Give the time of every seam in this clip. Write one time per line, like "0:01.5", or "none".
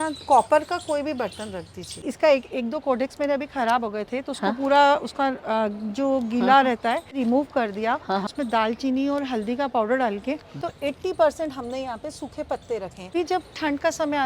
0:02.0
0:08.3
0:10.6
0:13.1